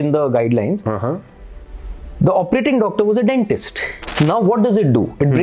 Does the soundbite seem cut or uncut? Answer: cut